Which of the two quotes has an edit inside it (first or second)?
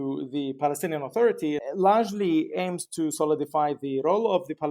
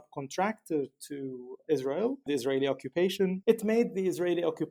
first